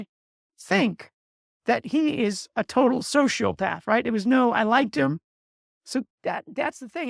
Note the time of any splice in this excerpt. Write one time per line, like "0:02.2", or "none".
none